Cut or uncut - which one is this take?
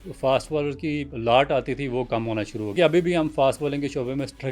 cut